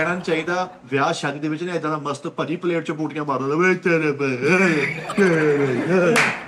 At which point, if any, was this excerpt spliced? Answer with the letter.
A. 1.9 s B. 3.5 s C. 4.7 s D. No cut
D